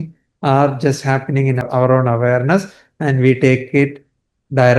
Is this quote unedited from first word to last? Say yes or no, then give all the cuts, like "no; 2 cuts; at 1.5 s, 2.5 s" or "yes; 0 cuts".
no; 1 cut; at 1.6 s